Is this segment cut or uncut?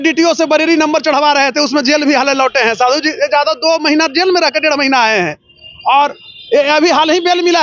uncut